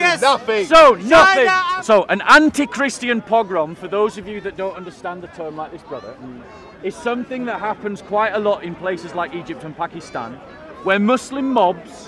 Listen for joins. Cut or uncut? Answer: cut